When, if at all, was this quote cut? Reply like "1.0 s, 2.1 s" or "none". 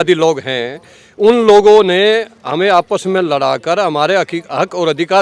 none